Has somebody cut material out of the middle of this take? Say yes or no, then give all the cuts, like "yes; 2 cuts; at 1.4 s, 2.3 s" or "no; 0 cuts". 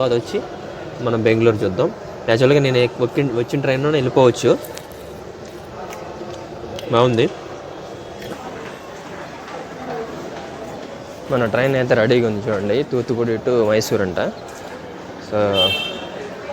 yes; 1 cut; at 8.3 s